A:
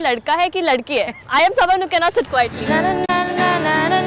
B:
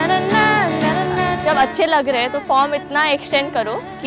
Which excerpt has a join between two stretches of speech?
B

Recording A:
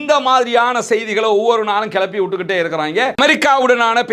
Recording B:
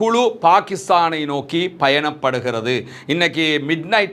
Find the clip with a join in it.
A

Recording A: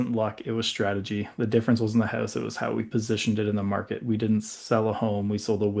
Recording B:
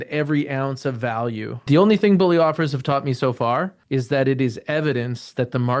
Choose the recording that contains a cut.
B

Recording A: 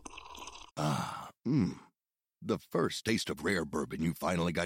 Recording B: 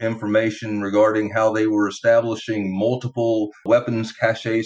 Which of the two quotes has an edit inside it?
B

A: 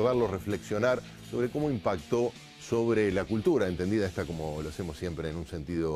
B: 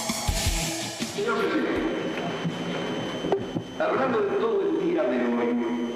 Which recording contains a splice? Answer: B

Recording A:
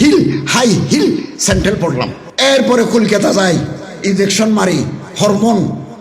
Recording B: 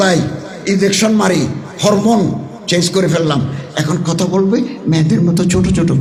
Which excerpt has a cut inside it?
A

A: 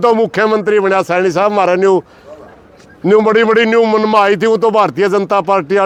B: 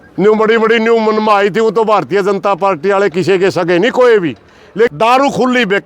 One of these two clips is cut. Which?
B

